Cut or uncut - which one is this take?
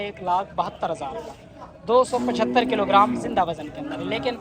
uncut